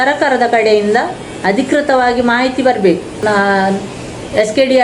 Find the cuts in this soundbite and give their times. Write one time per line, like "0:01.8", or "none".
0:03.1